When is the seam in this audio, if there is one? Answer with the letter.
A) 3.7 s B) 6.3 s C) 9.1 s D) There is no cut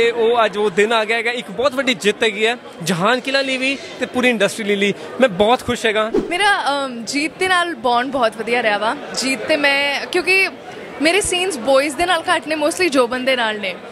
B